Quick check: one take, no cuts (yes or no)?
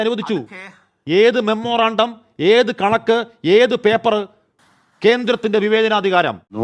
yes